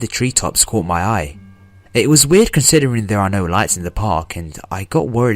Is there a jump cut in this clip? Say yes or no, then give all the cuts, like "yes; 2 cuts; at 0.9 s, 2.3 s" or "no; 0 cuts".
yes; 1 cut; at 1.1 s